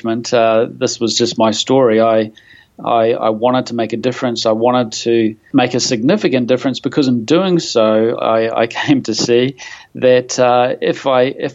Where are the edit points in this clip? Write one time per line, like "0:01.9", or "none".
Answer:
0:05.4